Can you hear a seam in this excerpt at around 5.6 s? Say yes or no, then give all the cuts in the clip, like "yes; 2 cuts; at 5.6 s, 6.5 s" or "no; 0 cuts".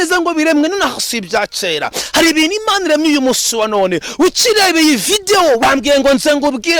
yes; 1 cut; at 5.6 s